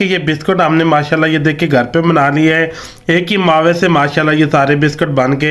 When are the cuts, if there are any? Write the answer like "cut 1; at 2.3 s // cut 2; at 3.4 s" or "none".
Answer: none